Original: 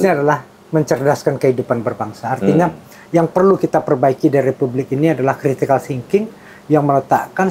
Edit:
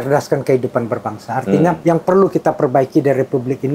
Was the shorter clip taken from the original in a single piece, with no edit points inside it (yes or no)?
no